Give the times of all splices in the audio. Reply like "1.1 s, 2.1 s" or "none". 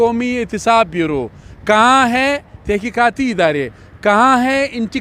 none